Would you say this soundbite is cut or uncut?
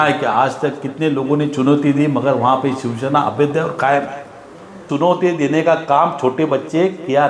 cut